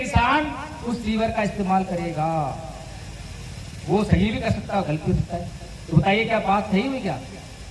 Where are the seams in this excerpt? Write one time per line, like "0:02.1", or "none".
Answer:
none

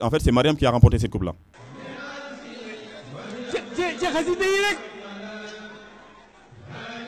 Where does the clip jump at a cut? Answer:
0:01.5

